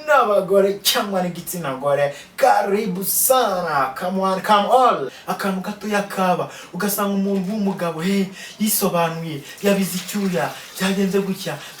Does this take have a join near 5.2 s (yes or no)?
yes